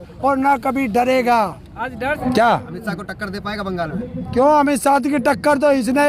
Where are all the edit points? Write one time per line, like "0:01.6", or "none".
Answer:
0:02.1

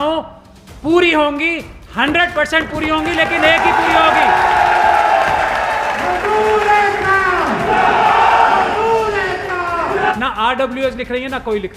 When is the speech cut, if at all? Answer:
0:10.1

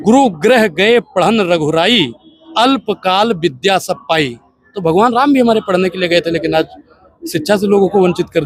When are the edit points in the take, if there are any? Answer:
none

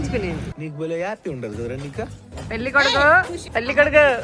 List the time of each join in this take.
0:02.3
0:03.4

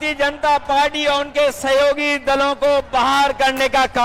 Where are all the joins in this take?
none

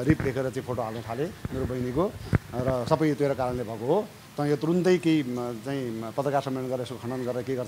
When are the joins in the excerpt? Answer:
none

